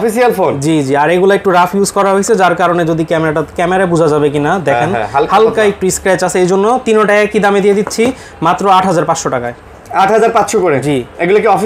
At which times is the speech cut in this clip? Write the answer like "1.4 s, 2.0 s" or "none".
none